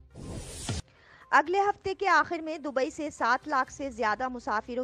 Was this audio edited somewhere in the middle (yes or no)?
yes